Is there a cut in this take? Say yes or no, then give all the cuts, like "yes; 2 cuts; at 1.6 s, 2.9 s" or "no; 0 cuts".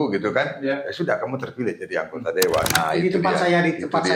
yes; 1 cut; at 2.7 s